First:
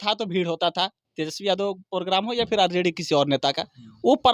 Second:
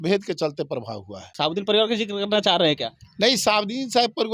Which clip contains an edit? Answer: second; 1 cut; at 1.3 s

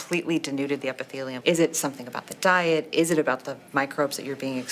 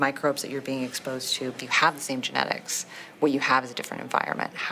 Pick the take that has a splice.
first; 1 cut; at 1.3 s

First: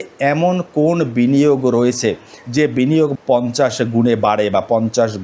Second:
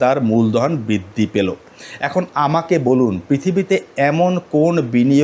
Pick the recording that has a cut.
first; 1 cut; at 3.1 s

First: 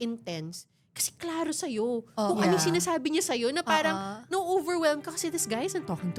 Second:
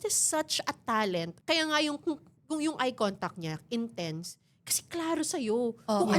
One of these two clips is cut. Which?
second; 1 cut; at 1.3 s

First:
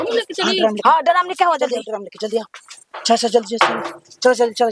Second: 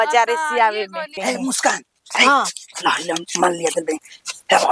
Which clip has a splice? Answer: second; 1 cut; at 1.2 s

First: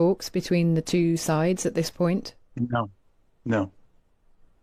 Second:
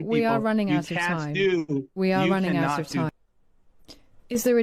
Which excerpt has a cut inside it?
second; 1 cut; at 3.1 s

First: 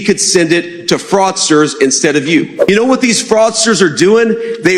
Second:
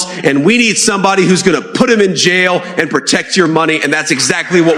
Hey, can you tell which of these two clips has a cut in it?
first; 1 cut; at 2.7 s

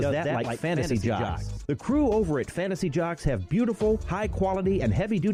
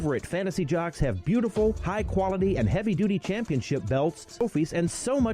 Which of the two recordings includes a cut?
second; 1 cut; at 4.3 s

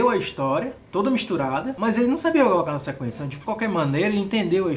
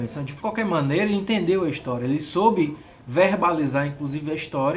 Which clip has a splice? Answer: first; 1 cut; at 1.7 s

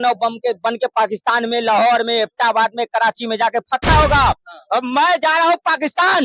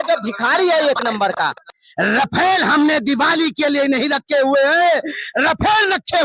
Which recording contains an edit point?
second; 1 cut; at 1.7 s

